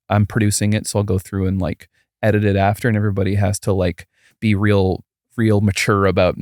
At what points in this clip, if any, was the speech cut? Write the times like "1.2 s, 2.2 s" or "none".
4.2 s